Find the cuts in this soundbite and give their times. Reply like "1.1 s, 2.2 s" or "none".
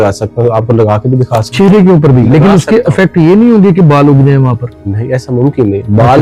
none